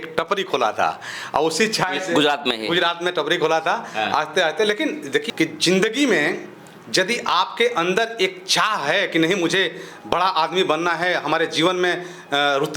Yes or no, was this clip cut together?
yes